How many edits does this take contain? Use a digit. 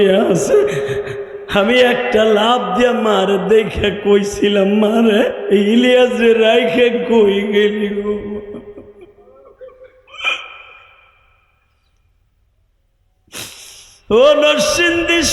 1